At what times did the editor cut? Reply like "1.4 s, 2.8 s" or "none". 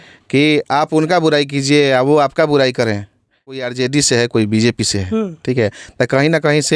3.6 s

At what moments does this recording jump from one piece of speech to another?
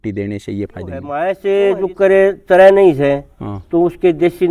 1.1 s

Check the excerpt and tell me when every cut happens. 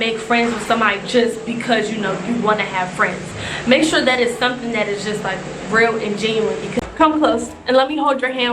6.8 s

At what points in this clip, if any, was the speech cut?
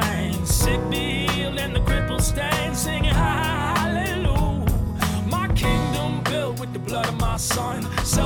none

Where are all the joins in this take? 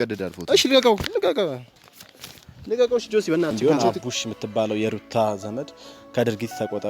3.6 s

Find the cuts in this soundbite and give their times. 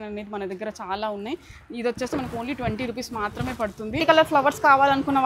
4.0 s

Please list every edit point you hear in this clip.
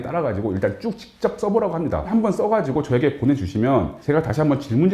2.1 s, 4.0 s

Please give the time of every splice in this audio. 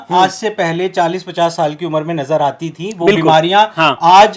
none

